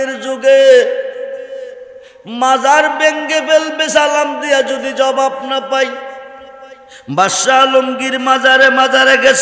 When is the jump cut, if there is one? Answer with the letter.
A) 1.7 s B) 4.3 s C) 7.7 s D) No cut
D